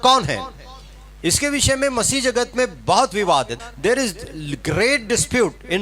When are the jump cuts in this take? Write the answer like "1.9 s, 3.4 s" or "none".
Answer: 3.5 s